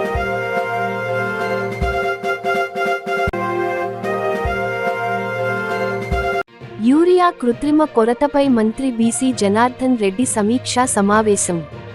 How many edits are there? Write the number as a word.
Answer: three